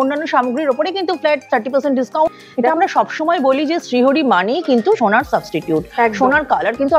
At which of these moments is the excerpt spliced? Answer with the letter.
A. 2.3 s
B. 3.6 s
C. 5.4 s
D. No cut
A